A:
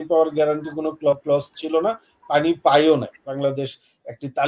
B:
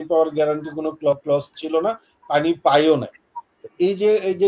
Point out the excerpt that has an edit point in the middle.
A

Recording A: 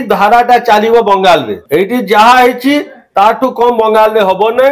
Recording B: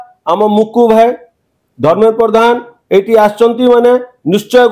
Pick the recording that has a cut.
A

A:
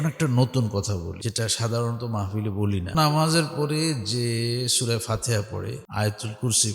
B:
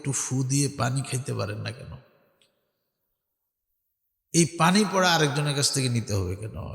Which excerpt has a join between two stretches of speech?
A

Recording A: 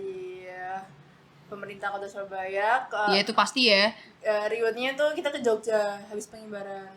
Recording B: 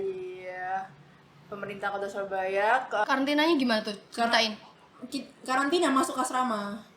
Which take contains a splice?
B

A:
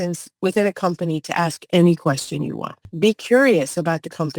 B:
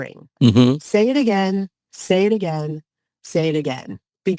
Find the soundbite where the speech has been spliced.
A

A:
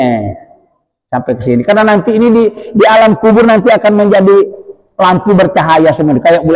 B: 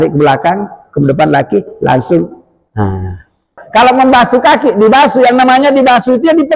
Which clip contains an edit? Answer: B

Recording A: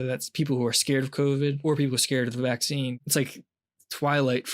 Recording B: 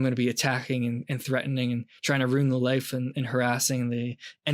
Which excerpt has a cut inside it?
A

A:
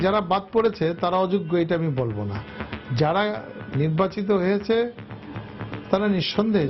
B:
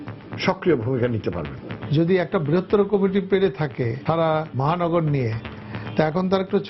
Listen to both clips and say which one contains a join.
B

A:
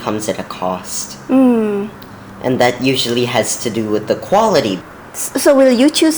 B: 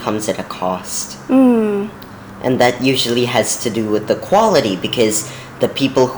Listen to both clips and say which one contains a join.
A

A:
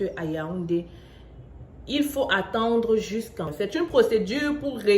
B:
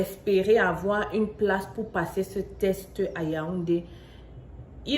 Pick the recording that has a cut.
A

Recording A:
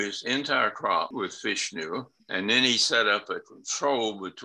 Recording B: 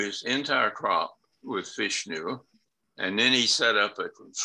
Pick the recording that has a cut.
A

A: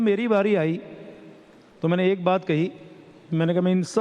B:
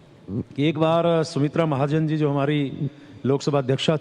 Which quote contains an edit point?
B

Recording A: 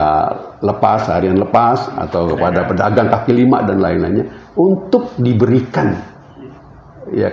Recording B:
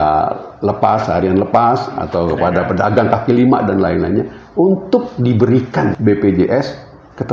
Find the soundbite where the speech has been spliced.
B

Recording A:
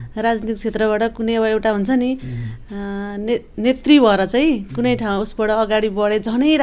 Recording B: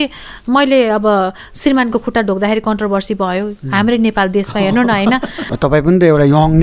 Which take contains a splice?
B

